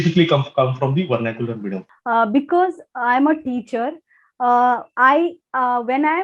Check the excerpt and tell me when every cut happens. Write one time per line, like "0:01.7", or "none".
0:01.8